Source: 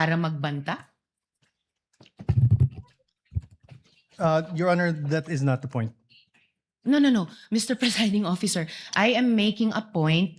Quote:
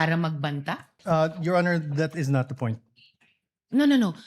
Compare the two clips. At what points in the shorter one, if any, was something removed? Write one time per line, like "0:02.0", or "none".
0:00.9